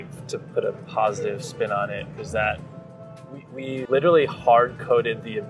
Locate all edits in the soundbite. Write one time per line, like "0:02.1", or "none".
0:03.9